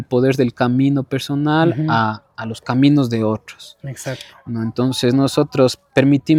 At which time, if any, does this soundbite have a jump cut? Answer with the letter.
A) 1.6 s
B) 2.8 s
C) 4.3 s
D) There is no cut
D